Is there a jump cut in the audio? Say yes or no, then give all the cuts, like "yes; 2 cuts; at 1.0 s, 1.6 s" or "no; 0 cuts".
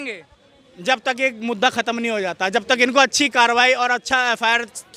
no; 0 cuts